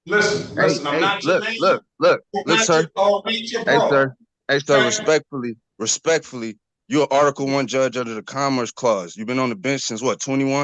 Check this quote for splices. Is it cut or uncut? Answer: uncut